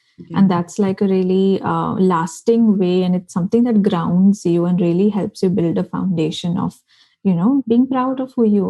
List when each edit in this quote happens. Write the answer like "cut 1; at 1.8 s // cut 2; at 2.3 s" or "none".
cut 1; at 7.6 s